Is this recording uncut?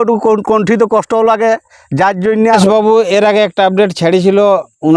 no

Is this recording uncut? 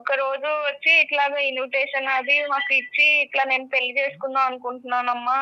yes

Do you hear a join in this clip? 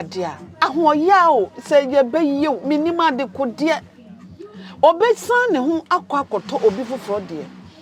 no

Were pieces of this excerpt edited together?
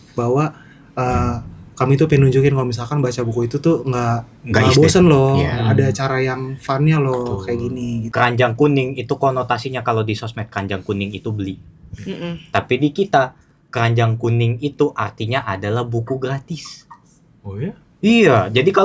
yes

